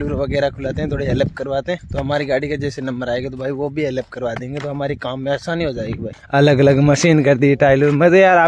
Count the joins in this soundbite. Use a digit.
2